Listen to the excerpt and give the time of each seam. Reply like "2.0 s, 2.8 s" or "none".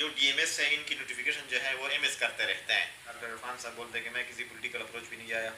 3.2 s